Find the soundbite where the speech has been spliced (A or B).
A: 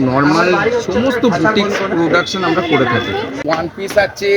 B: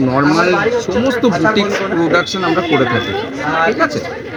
A